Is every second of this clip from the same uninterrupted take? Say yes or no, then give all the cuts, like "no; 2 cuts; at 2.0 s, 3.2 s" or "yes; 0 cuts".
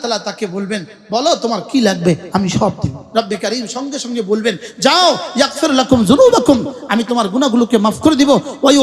no; 1 cut; at 3.0 s